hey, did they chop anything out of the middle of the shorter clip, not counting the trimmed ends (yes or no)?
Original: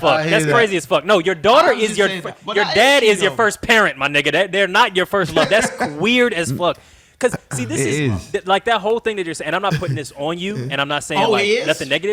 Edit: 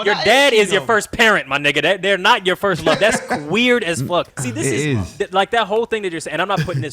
yes